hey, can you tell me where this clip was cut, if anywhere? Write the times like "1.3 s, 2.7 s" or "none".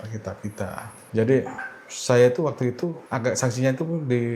1.0 s, 3.0 s